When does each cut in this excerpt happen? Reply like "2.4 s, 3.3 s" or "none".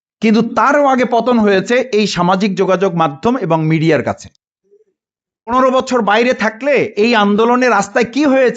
5.5 s